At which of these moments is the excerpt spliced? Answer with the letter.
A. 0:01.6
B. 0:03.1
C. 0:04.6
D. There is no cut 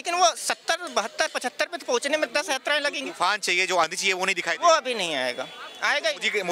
D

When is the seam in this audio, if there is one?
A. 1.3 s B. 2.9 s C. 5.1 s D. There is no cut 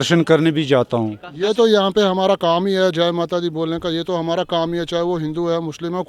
A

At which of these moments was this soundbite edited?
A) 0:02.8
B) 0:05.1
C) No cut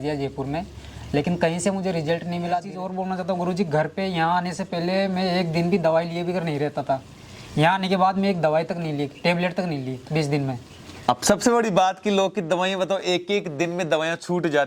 A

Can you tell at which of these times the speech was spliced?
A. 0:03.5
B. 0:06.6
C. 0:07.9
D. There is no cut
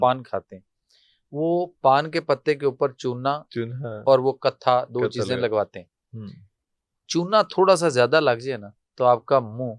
D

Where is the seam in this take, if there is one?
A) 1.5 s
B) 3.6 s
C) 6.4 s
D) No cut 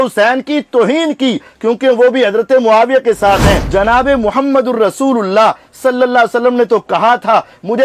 B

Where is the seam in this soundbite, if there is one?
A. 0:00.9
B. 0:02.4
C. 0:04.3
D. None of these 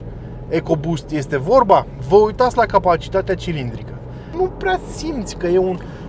C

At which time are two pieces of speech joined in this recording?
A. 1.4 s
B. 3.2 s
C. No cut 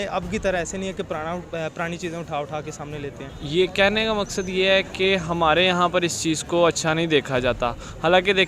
B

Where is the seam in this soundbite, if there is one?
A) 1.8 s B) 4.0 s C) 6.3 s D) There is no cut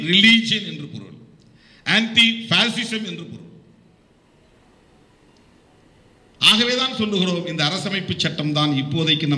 D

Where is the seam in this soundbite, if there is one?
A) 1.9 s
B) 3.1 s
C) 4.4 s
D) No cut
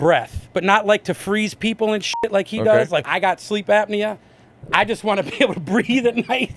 D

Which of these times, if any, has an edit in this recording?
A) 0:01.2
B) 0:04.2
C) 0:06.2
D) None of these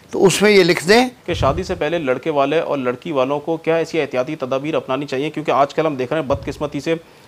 A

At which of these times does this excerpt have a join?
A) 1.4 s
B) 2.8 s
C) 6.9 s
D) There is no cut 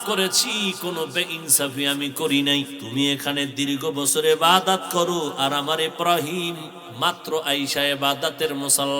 B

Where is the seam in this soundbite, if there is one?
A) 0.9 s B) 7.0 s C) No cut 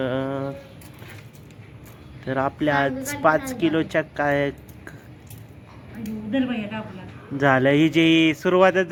C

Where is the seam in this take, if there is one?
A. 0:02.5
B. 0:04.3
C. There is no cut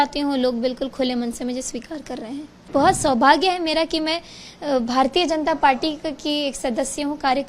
A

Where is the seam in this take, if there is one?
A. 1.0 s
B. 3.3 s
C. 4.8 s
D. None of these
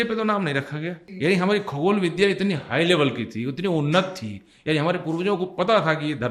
A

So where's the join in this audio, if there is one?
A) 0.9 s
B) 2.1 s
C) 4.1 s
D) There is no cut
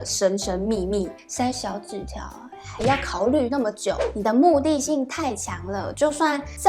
C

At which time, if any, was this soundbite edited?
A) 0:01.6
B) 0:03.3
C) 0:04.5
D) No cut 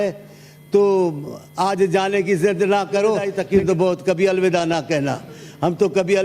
B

